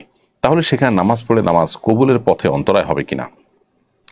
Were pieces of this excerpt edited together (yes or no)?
no